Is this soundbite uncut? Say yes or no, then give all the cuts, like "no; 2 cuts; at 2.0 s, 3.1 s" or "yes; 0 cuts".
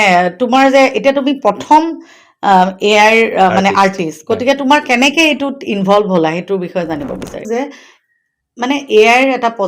no; 1 cut; at 7.5 s